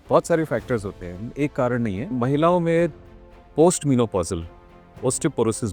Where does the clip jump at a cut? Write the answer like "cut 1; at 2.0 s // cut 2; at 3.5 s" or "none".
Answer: none